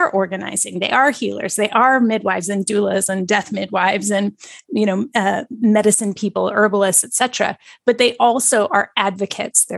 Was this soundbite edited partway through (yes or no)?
no